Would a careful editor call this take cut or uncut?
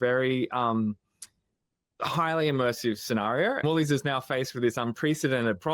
cut